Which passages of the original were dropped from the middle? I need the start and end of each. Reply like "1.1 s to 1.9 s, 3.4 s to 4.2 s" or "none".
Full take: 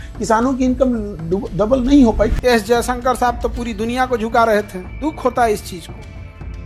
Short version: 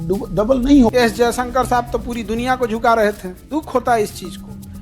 2.1 s to 2.4 s